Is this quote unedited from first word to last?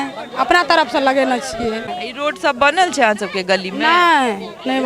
no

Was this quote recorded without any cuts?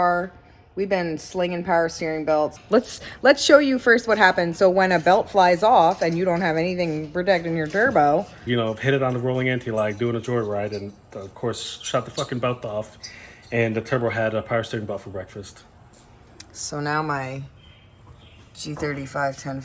no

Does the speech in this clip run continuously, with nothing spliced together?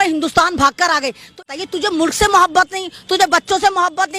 no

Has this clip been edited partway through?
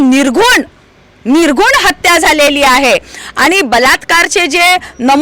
no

